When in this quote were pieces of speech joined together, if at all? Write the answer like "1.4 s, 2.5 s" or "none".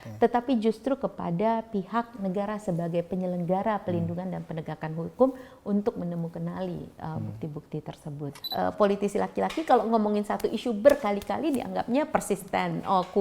8.4 s